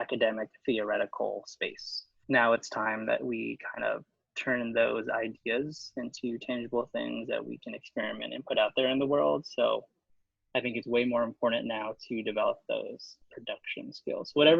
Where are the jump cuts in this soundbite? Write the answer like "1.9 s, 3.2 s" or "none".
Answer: 2.2 s